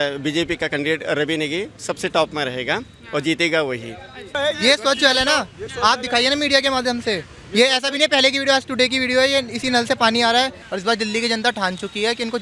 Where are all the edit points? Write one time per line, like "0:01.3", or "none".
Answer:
0:04.4
0:10.6